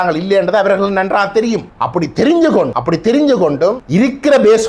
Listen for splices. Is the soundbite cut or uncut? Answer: cut